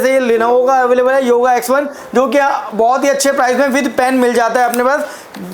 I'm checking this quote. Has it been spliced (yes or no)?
no